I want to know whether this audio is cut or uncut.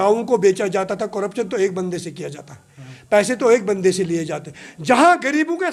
uncut